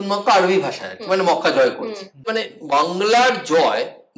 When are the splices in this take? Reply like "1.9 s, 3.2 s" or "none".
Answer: 2.5 s